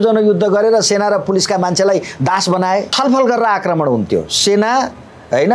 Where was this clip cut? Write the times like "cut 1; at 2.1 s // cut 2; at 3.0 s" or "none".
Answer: cut 1; at 2.9 s